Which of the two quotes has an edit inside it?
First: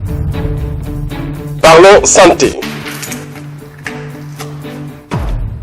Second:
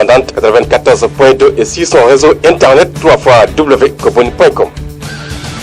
first; 1 cut; at 4.6 s

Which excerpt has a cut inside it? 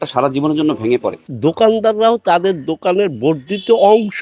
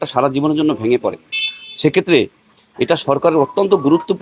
first; 1 cut; at 1.3 s

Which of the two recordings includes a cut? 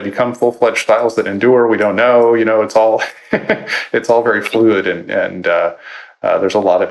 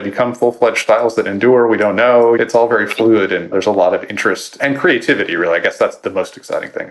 second; 4 cuts; at 2.4 s, 3.5 s, 4.6 s, 6.0 s

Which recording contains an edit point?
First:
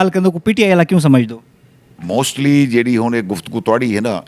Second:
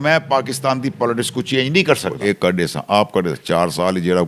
second; 1 cut; at 2.1 s

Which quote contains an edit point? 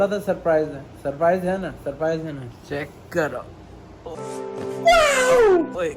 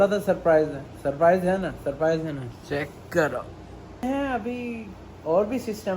second; 1 cut; at 4.0 s

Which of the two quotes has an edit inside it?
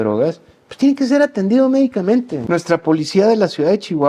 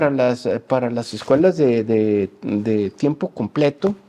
first; 1 cut; at 2.4 s

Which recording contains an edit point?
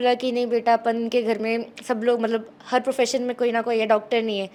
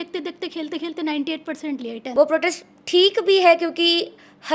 second; 1 cut; at 2.0 s

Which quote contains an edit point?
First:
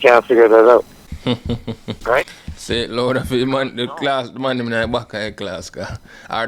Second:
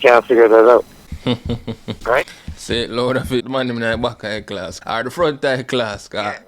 second; 2 cuts; at 3.4 s, 4.7 s

